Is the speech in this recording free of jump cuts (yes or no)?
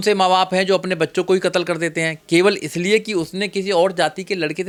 yes